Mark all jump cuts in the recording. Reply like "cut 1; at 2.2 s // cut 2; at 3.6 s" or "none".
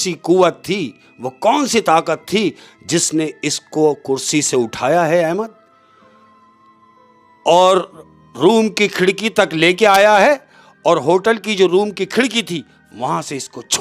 none